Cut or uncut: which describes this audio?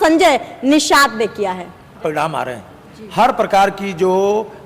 cut